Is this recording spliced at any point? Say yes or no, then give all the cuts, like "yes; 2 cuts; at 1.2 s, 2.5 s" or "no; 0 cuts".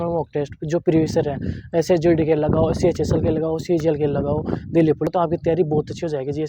yes; 1 cut; at 5.1 s